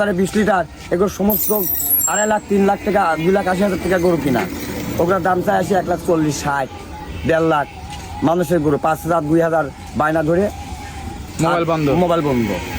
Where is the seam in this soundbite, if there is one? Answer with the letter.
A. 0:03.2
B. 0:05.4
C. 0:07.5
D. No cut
D